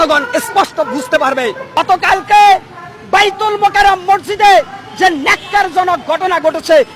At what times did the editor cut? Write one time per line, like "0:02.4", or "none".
0:01.8